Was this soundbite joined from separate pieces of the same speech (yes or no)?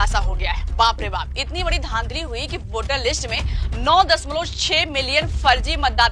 no